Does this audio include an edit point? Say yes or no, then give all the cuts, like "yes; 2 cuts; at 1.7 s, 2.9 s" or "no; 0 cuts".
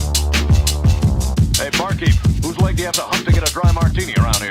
yes; 1 cut; at 1.2 s